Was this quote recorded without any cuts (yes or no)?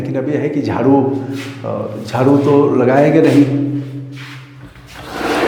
yes